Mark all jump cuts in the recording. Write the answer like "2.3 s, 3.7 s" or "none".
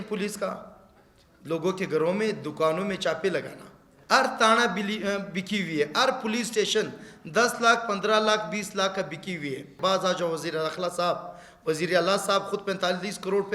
3.9 s, 9.7 s